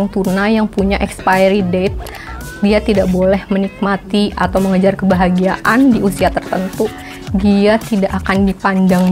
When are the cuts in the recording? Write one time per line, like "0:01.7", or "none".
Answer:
none